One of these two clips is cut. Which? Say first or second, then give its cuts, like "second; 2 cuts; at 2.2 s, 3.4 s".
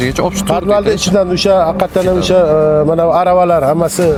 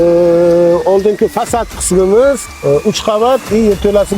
second; 1 cut; at 2.5 s